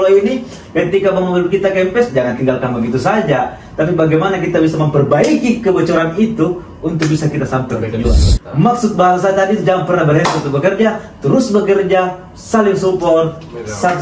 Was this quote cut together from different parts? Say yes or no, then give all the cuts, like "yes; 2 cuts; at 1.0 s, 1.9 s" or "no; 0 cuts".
yes; 1 cut; at 8.4 s